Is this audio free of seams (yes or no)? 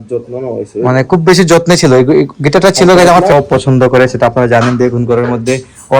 no